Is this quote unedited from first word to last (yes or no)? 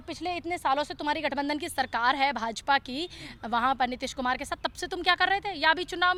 yes